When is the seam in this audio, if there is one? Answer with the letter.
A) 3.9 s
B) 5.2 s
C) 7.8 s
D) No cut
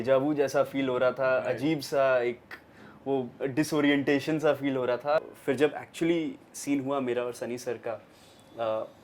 B